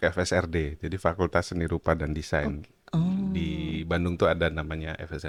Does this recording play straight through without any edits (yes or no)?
yes